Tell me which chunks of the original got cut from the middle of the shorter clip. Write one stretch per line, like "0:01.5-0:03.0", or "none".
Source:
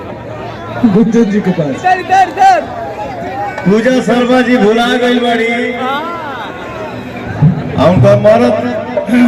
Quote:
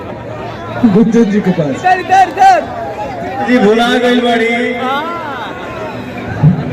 0:03.5-0:04.5